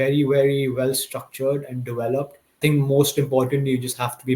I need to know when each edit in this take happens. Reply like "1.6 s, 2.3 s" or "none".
2.6 s